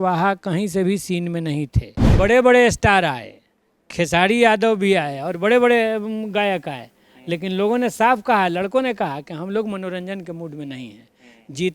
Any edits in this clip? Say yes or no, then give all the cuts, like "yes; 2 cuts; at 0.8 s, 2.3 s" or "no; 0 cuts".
yes; 1 cut; at 2.1 s